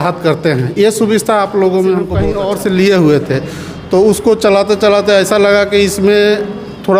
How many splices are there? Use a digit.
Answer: 1